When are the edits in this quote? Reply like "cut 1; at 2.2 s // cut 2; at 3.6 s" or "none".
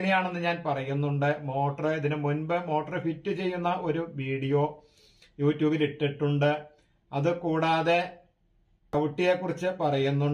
cut 1; at 8.9 s